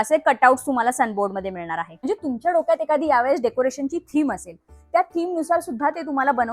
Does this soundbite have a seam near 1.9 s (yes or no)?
yes